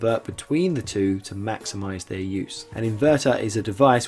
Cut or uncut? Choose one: cut